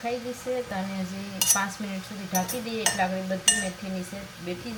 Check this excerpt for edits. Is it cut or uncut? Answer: uncut